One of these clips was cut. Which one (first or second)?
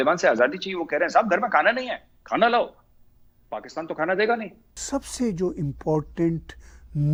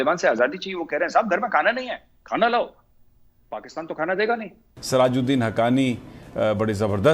second